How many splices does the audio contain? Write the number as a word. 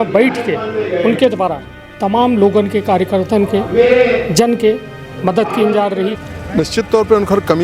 one